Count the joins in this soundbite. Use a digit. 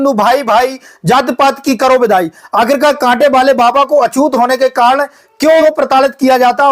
1